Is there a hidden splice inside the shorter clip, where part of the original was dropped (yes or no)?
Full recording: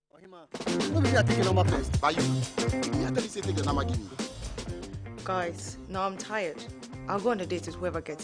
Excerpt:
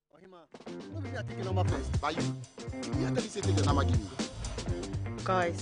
no